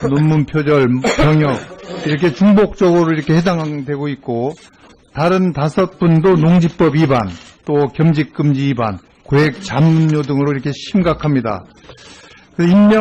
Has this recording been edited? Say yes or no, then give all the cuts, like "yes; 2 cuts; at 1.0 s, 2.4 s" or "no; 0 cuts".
yes; 1 cut; at 9.6 s